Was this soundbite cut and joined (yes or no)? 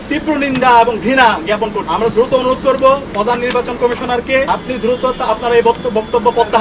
yes